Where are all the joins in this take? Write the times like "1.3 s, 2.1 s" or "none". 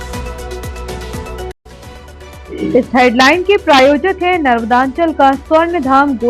1.5 s